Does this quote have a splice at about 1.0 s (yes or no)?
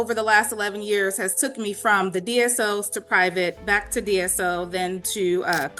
no